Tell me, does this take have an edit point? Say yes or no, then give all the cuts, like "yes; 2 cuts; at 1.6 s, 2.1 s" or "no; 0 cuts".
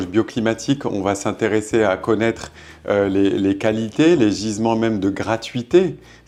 no; 0 cuts